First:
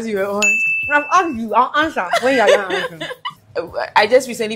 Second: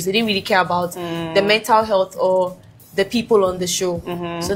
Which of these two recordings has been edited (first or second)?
first